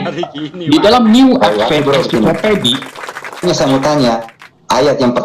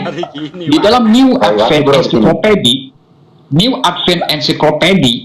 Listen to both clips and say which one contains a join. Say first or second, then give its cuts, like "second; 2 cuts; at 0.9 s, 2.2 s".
first; 1 cut; at 3.4 s